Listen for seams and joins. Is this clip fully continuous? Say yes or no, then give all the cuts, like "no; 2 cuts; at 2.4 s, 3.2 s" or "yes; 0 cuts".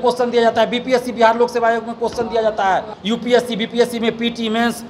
no; 1 cut; at 2.9 s